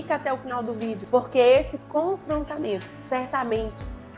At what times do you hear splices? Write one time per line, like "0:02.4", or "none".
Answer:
0:02.9